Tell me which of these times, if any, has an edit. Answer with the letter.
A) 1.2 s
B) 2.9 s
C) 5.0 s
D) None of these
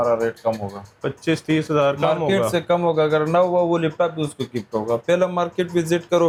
D